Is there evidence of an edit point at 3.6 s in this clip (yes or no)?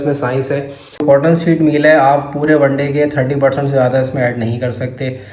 no